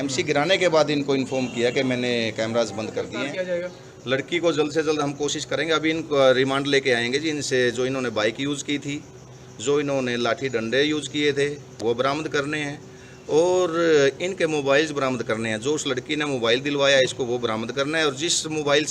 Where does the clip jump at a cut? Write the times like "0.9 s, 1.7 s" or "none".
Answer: 3.2 s